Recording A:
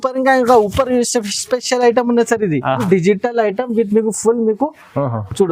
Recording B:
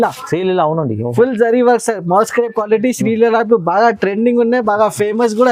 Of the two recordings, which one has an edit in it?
A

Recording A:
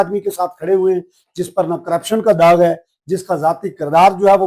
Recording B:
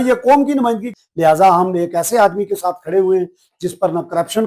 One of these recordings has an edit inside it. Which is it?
B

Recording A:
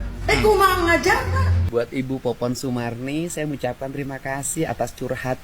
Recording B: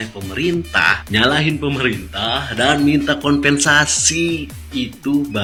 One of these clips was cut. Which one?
A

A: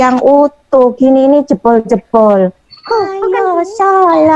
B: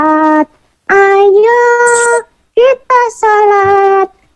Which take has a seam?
A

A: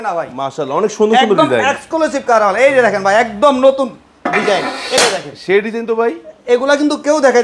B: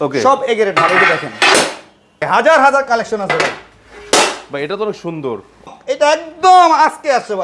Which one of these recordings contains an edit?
B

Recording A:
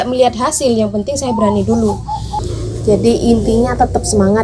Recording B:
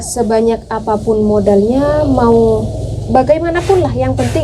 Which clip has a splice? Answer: A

